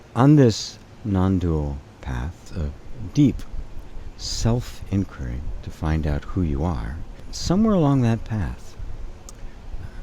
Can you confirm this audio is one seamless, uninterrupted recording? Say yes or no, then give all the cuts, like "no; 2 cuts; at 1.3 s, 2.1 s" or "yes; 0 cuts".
no; 2 cuts; at 2.5 s, 7.3 s